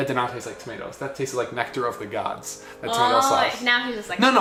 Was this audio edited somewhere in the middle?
no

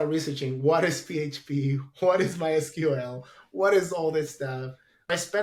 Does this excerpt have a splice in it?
no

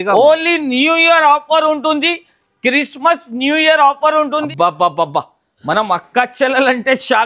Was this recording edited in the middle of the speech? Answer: yes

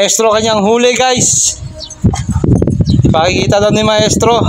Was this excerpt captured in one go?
yes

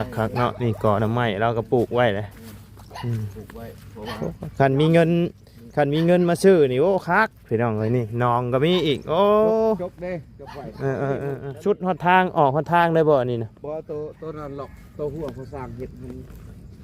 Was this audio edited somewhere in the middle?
yes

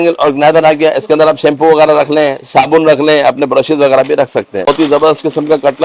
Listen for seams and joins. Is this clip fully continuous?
no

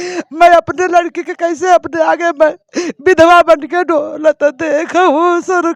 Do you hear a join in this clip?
no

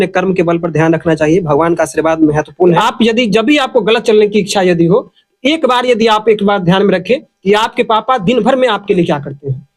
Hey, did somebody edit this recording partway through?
yes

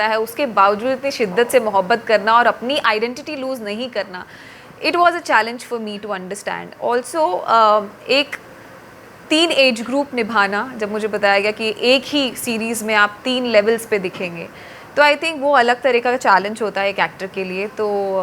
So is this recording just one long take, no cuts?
yes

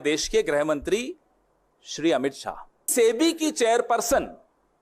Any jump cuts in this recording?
yes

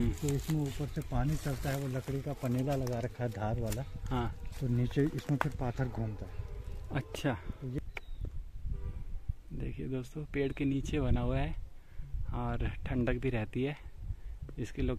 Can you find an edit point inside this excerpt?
yes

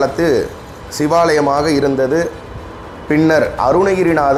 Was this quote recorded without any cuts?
yes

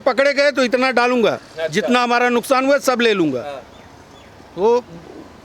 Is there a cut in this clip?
no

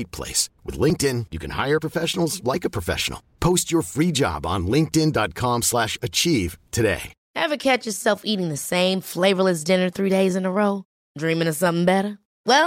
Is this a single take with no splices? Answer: no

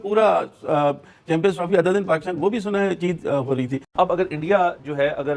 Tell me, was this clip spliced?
no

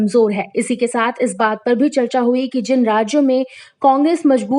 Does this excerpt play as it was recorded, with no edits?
yes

